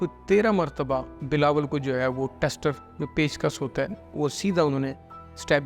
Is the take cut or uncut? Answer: cut